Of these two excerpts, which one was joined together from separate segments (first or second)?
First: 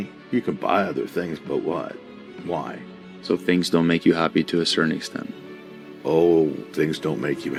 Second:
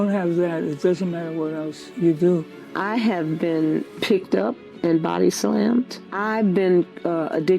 second